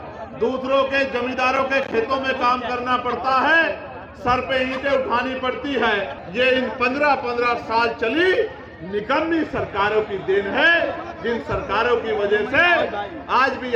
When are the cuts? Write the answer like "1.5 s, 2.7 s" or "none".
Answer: 6.2 s